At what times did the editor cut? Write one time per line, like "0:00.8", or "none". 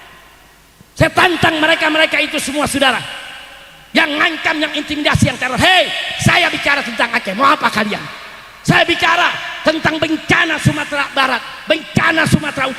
none